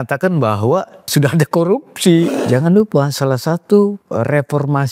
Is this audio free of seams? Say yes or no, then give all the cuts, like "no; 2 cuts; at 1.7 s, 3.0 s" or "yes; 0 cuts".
no; 2 cuts; at 1.1 s, 2.4 s